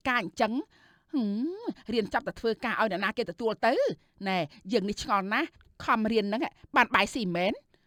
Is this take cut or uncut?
uncut